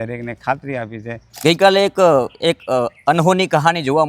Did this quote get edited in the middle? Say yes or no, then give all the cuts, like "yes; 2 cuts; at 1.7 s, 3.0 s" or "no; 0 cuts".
yes; 1 cut; at 1.3 s